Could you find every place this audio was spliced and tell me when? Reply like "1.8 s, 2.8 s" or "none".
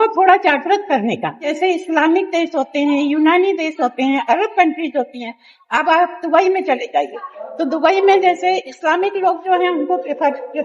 1.5 s